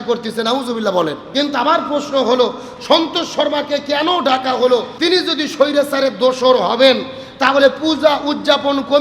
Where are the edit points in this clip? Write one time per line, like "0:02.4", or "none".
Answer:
0:01.2
0:04.9